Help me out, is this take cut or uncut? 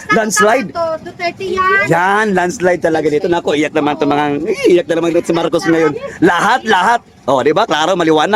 uncut